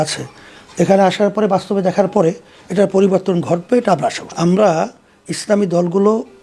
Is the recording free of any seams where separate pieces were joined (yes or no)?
no